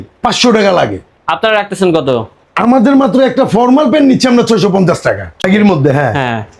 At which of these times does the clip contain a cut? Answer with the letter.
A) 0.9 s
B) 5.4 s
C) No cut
B